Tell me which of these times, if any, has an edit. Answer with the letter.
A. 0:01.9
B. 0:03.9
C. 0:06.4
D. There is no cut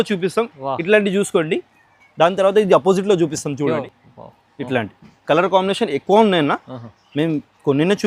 B